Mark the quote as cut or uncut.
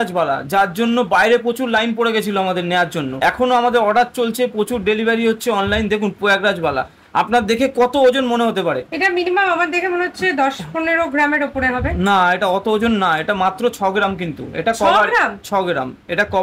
uncut